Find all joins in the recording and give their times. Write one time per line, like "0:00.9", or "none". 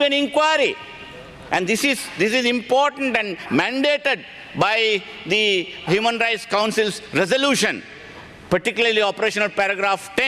none